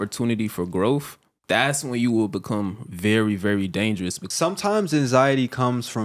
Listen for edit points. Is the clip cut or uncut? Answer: cut